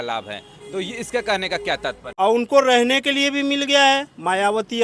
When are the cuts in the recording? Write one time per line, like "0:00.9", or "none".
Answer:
0:02.0